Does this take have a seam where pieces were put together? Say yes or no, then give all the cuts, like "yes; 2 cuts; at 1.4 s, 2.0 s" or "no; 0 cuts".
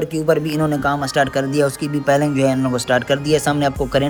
no; 0 cuts